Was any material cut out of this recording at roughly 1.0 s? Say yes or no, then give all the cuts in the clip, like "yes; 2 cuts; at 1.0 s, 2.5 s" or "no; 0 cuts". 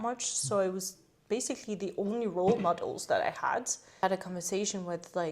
no; 1 cut; at 4.0 s